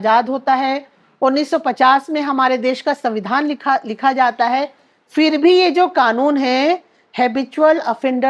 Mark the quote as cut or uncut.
uncut